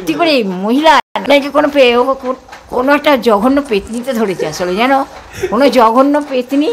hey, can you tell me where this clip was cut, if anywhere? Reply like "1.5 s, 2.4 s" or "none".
1.1 s